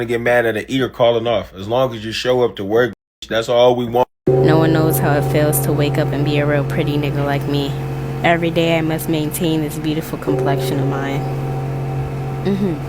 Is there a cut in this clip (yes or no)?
yes